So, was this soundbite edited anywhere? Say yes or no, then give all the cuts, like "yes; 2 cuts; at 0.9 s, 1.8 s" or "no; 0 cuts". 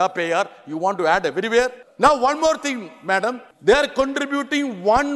yes; 2 cuts; at 1.8 s, 3.5 s